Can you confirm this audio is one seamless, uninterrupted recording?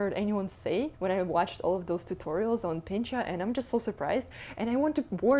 no; 1 cut; at 0.9 s

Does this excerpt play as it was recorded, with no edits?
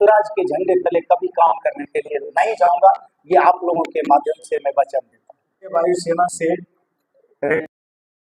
yes; 0 cuts

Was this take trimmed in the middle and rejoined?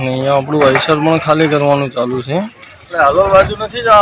yes; 1 cut; at 2.9 s

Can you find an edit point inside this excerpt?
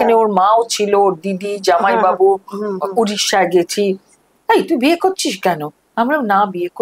yes; 1 cut; at 4.3 s

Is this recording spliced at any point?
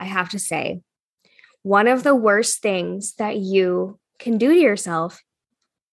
no; 0 cuts

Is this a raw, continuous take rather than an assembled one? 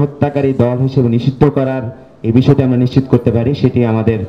yes; 0 cuts

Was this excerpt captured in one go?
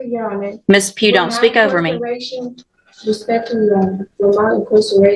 yes; 0 cuts

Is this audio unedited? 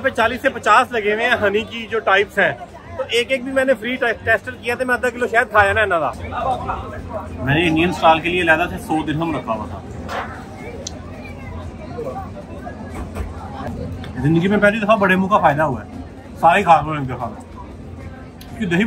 no; 2 cuts; at 6.2 s, 13.7 s

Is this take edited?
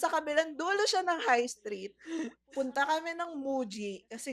no; 0 cuts

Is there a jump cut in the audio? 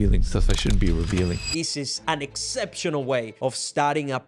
yes; 2 cuts; at 1.5 s, 3.3 s

